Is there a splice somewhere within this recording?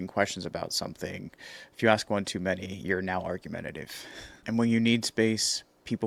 no; 0 cuts

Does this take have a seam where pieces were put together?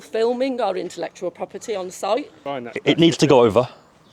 yes; 1 cut; at 2.4 s

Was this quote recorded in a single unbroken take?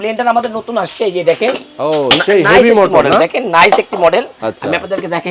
yes; 0 cuts

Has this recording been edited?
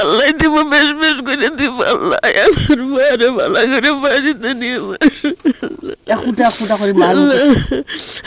no; 0 cuts

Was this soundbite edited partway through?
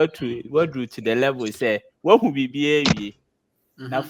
no; 0 cuts

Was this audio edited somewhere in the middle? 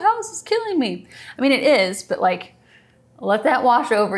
no; 0 cuts

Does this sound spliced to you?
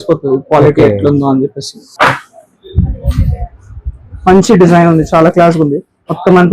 yes; 1 cut; at 1.8 s

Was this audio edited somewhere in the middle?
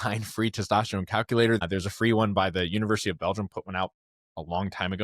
yes; 1 cut; at 1.6 s

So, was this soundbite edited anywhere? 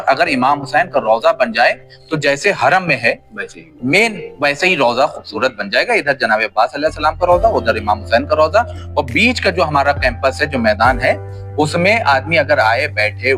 no; 0 cuts

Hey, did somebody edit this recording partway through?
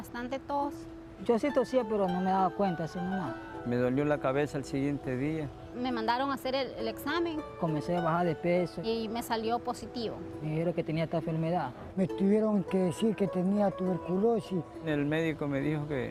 no; 0 cuts

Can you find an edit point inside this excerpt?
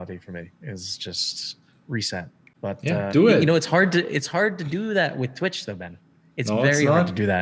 yes; 1 cut; at 2.4 s

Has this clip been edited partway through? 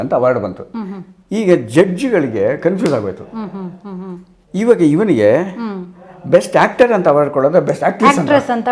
no; 0 cuts

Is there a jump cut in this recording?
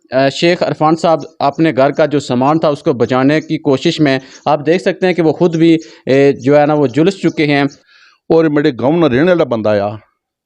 yes; 1 cut; at 7.8 s

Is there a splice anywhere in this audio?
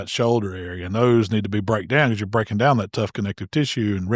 no; 0 cuts

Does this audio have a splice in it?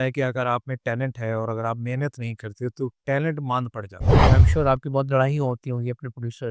yes; 1 cut; at 4.2 s

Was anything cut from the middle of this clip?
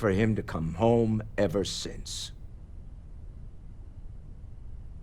yes; 1 cut; at 2.1 s

